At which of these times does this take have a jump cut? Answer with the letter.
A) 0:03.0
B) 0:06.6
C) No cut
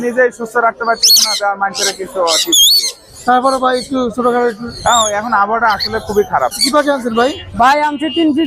B